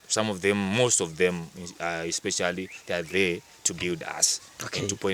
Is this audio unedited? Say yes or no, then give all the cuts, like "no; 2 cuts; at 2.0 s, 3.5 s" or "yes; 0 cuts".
yes; 0 cuts